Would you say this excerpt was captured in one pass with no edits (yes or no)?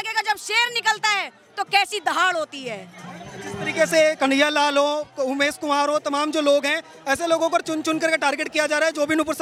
yes